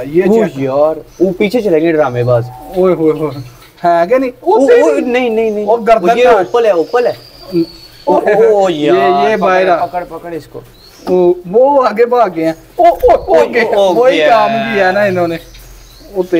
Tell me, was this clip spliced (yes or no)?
no